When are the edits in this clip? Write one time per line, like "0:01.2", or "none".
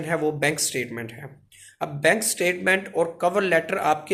none